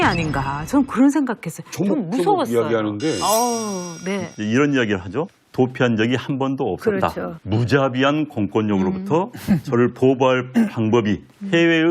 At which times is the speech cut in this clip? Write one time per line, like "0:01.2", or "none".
0:04.0